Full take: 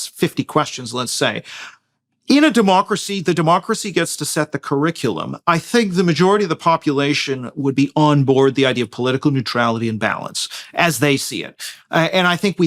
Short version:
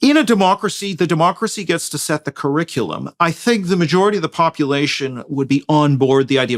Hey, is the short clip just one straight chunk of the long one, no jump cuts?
yes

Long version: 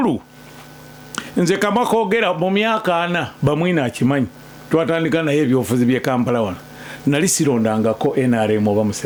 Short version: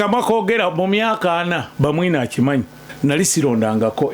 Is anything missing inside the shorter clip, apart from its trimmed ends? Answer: yes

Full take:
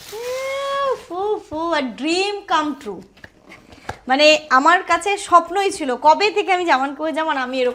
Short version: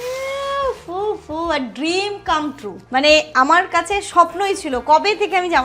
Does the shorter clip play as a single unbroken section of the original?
no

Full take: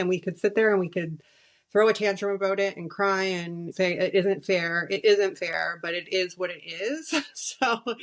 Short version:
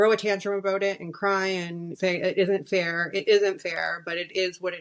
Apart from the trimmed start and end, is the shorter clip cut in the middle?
no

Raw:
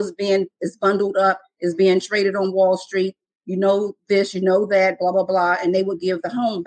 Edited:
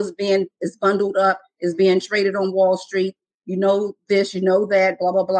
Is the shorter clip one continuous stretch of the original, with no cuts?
yes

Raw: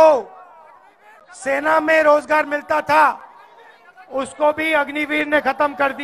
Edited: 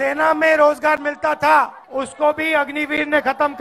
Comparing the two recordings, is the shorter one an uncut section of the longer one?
no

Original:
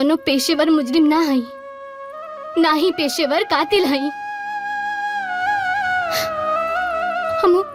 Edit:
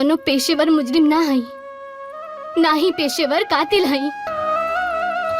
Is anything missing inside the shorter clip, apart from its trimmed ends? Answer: yes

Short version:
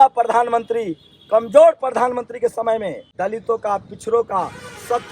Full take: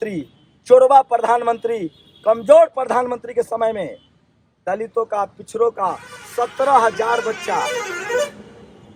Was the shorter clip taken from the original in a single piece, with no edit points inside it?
no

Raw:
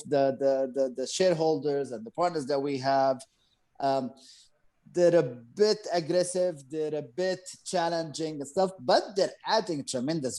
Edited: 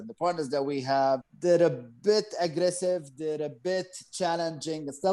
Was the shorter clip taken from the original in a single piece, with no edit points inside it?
no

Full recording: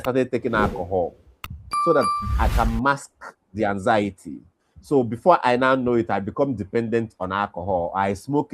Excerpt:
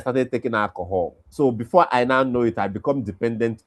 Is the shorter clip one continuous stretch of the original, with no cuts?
no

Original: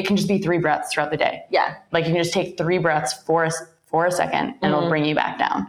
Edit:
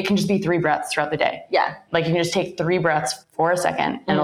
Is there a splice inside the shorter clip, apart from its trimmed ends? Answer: yes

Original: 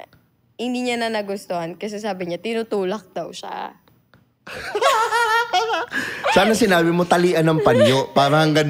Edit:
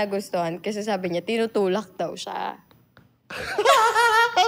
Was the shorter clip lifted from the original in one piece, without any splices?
yes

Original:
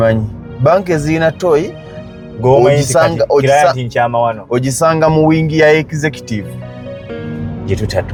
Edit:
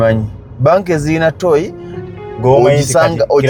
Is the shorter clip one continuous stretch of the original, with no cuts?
yes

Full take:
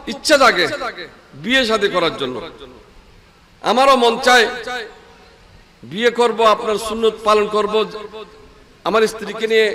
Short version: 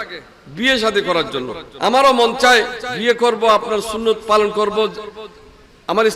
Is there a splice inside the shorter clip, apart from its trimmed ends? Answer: yes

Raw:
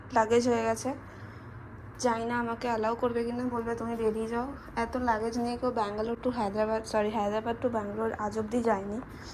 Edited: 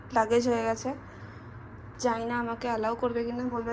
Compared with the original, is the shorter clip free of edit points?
yes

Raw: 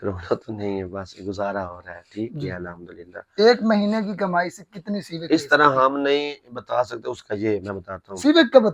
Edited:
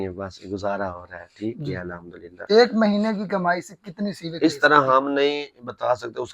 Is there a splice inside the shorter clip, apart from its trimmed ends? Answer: yes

